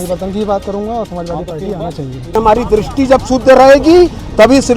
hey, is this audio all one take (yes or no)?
no